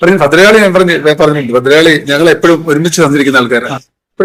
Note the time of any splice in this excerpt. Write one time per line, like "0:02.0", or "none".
none

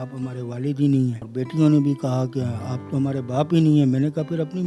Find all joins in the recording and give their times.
0:01.2

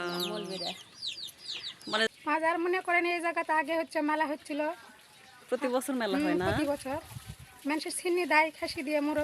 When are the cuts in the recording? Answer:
0:02.1

